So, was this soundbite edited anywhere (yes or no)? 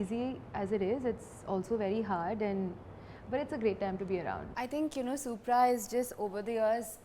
yes